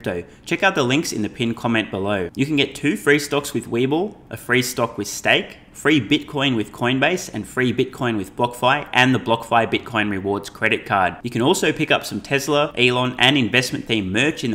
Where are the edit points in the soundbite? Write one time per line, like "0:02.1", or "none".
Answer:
0:12.7

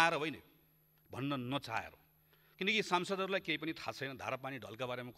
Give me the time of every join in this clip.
none

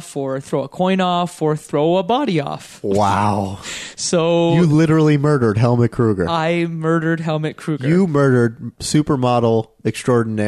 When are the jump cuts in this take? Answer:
none

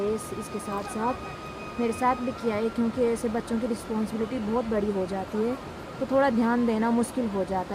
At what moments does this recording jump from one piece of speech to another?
none

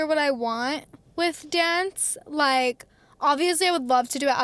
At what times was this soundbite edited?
none

